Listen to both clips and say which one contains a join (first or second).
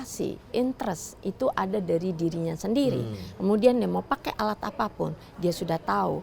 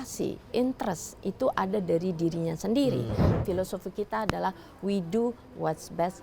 second